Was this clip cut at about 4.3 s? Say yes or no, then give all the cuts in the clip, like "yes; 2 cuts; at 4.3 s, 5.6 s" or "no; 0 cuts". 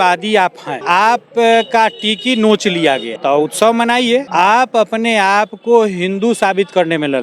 yes; 3 cuts; at 0.8 s, 3.1 s, 4.3 s